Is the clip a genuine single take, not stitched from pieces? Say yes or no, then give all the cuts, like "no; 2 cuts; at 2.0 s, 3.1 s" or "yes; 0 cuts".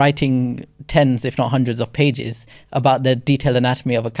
yes; 0 cuts